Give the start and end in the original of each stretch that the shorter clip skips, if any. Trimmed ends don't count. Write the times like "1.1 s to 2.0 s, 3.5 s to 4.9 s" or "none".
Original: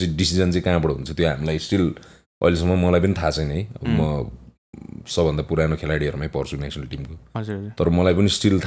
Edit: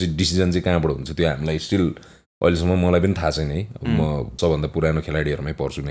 4.3 s to 5.0 s